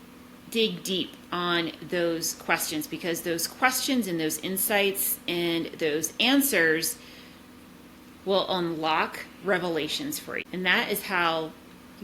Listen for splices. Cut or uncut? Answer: cut